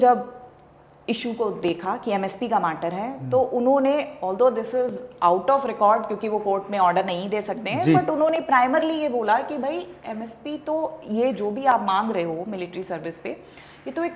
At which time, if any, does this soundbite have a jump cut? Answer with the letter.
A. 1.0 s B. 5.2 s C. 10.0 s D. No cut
D